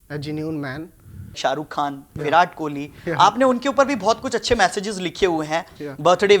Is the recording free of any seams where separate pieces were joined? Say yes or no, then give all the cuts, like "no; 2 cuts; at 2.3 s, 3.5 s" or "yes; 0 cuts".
no; 1 cut; at 1.3 s